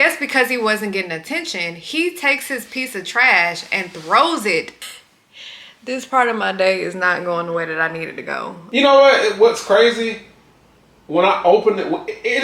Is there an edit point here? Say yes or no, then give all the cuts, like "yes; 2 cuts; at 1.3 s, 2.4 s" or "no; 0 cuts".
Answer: yes; 2 cuts; at 4.7 s, 8.6 s